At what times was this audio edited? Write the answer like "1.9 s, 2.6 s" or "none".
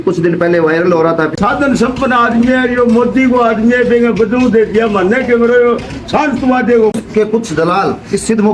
1.3 s, 6.9 s